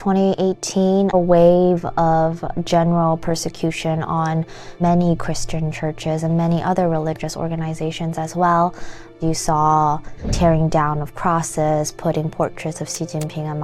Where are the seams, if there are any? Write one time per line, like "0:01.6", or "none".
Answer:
0:01.1
0:04.8
0:09.1
0:10.3